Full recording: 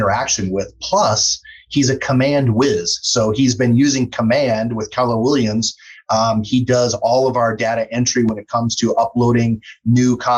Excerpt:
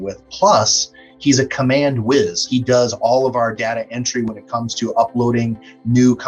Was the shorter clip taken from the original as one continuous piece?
no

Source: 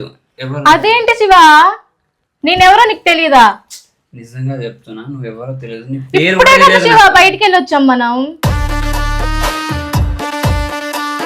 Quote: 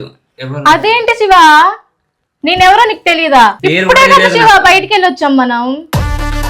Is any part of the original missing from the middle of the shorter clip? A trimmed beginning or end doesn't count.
yes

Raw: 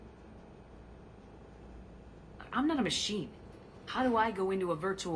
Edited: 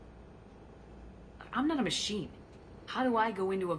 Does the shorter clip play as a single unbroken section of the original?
no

